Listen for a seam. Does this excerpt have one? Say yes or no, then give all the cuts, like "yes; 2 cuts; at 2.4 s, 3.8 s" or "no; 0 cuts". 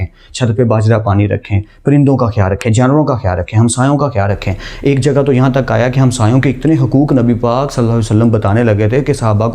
no; 0 cuts